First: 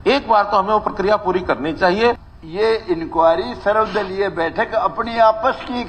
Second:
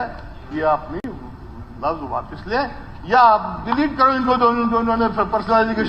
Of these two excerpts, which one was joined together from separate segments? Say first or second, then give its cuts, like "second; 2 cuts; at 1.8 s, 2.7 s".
first; 1 cut; at 2.3 s